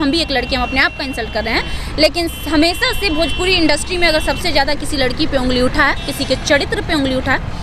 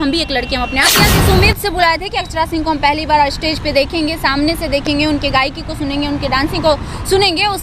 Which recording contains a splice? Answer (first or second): second